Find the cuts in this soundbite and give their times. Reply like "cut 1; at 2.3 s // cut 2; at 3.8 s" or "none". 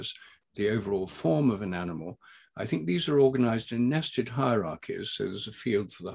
none

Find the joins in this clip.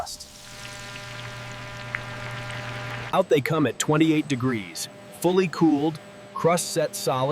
cut 1; at 3.0 s

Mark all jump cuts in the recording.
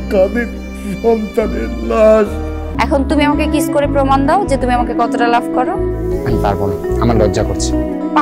cut 1; at 2.6 s

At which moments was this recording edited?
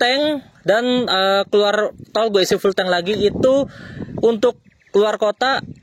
none

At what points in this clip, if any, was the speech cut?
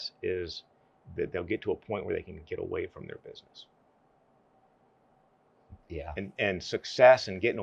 none

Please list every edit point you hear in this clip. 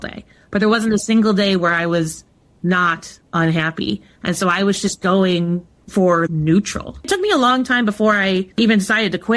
cut 1; at 7.1 s

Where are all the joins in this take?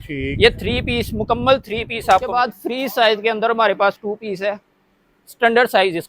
cut 1; at 2.3 s

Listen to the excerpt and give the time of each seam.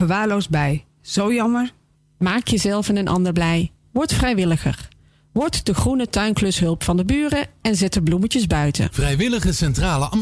cut 1; at 8.9 s

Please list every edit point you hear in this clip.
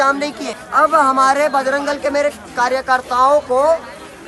none

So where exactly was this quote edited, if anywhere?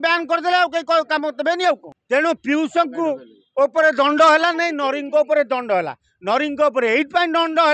cut 1; at 1.9 s

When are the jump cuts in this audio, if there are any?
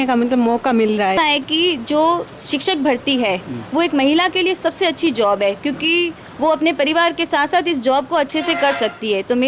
cut 1; at 1.2 s

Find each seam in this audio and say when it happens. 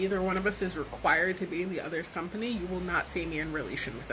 cut 1; at 2.3 s

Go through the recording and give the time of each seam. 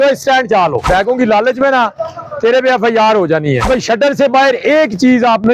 cut 1; at 0.8 s // cut 2; at 3.7 s

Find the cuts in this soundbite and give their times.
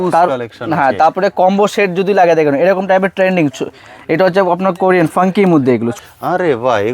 cut 1; at 5.9 s

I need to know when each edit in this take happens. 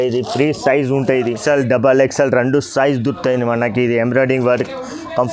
cut 1; at 1.4 s

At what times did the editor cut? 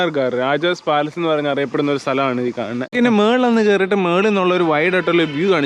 cut 1; at 2.9 s

